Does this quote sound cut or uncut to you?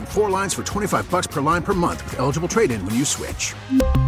uncut